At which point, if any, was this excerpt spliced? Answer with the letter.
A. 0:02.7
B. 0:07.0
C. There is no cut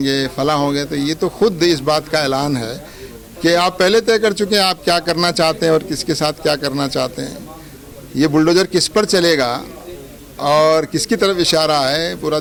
C